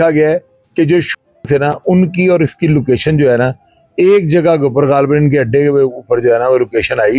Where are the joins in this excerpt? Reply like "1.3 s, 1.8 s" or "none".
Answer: none